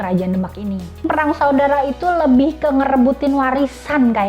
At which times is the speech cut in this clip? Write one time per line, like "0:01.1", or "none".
0:01.1